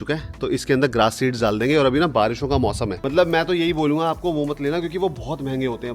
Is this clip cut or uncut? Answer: cut